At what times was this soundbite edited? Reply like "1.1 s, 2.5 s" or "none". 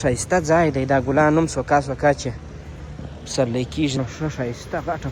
4.0 s